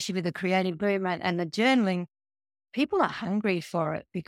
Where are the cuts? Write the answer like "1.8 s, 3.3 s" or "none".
none